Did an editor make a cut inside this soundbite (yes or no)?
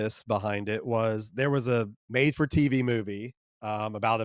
yes